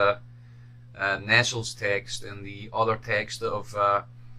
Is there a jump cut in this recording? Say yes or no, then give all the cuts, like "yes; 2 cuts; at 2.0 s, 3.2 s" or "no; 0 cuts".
yes; 1 cut; at 2.5 s